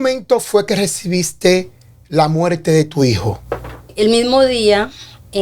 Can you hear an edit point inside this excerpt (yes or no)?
yes